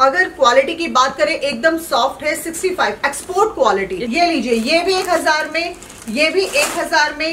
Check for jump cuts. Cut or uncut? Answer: cut